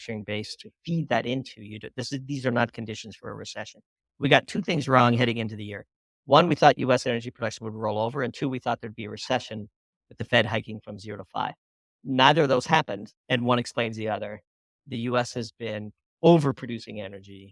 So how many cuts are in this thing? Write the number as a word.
zero